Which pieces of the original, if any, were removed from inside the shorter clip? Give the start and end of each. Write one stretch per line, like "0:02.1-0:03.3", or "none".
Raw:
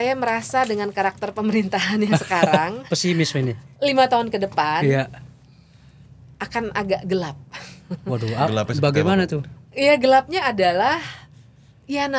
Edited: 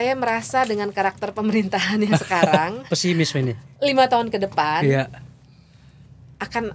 none

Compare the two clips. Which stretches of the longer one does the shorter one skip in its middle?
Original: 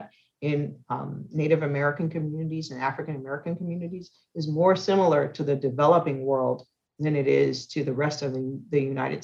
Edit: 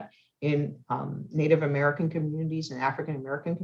none

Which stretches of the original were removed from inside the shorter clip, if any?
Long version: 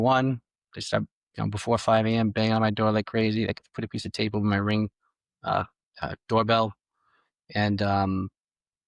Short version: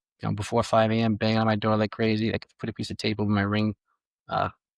none

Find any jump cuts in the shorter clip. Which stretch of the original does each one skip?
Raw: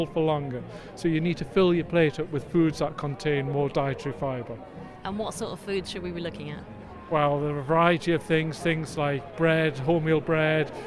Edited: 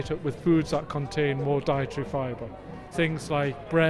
0:05.0-0:08.6

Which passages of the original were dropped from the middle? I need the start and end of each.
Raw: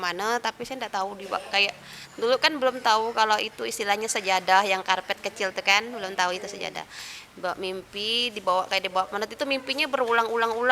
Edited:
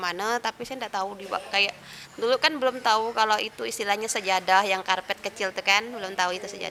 none

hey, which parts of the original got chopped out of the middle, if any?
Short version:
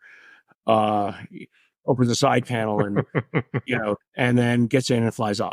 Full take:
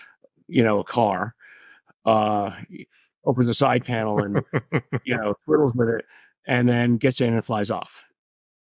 0:05.4-0:06.3

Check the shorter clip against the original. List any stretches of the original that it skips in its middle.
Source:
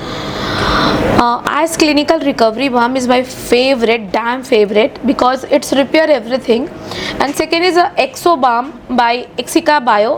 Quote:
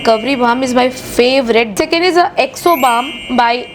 0:04.1-0:07.3

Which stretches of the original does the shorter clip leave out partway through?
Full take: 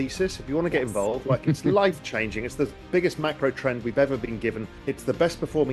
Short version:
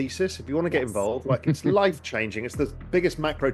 none

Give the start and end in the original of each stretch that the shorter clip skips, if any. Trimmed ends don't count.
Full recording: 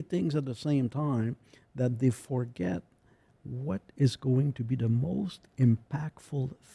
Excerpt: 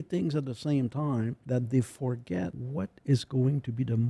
0:01.4-0:01.7
0:02.9-0:03.5

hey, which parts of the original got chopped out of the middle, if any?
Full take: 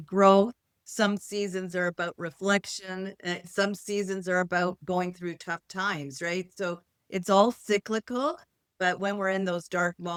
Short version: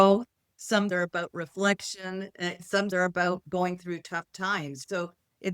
0:01.2-0:01.7
0:03.7-0:04.3
0:06.2-0:06.5

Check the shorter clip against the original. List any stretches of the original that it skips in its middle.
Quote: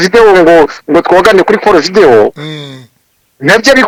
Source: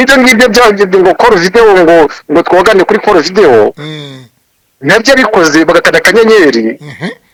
none

